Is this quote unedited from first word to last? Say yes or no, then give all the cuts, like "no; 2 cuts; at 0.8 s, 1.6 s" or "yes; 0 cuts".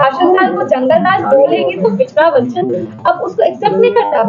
yes; 0 cuts